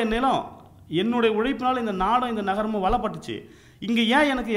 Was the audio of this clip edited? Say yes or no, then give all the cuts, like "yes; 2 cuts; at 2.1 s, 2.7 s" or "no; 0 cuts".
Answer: no; 0 cuts